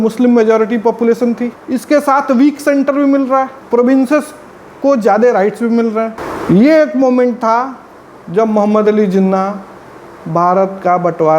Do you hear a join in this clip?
yes; 3 cuts; at 1.5 s, 3.6 s, 6.3 s

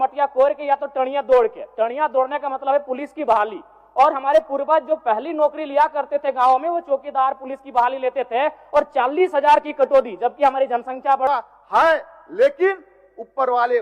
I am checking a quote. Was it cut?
yes; 1 cut; at 11.3 s

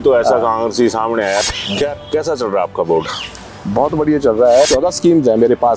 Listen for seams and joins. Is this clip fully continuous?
no; 2 cuts; at 1.5 s, 4.7 s

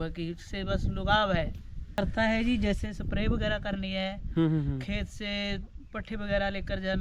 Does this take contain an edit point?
yes; 1 cut; at 2.0 s

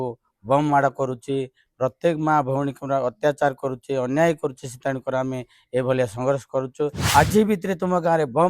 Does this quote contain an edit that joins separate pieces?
yes; 1 cut; at 7.0 s

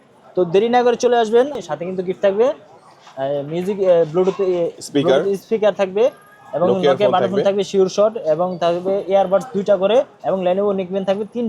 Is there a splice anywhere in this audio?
yes; 1 cut; at 1.6 s

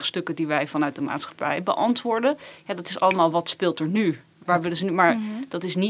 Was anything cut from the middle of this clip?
no; 0 cuts

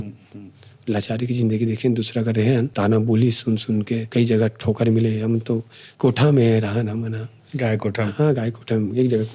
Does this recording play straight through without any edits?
no; 3 cuts; at 2.7 s, 4.1 s, 5.8 s

